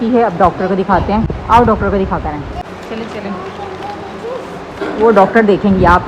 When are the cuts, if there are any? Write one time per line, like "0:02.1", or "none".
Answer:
none

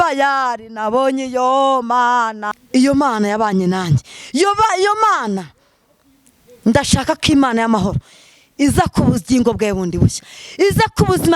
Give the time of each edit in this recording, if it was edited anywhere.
0:02.4

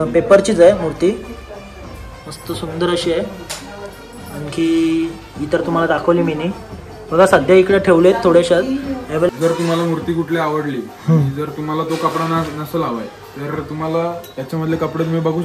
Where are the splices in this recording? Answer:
0:09.3

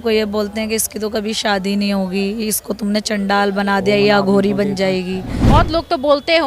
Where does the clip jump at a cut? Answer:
0:05.5

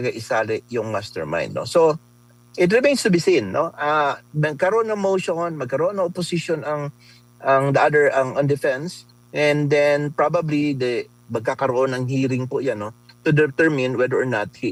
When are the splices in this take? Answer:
none

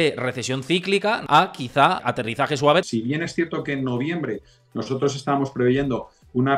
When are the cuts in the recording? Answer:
0:01.2
0:02.1
0:02.9

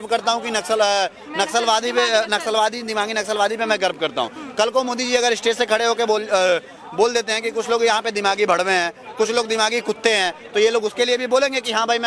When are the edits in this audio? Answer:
none

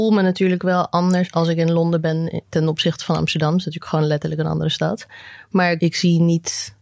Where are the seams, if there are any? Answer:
0:01.3
0:05.8

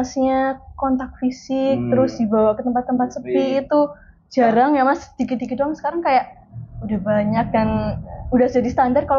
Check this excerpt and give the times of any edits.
none

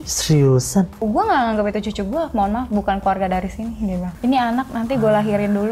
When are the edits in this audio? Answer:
0:01.0
0:04.1

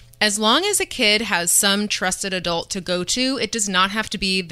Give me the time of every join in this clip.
none

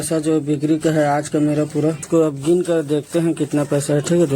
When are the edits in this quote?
0:02.0

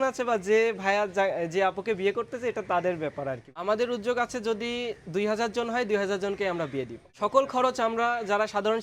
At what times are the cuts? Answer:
0:03.5
0:07.0

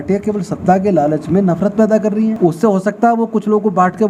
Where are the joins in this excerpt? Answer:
0:02.4

